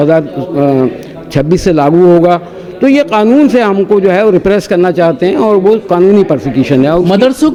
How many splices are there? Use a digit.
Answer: 0